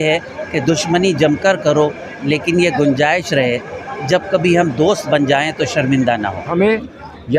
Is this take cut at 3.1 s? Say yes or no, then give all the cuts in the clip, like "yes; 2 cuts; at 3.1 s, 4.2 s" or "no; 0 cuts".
no; 1 cut; at 6.5 s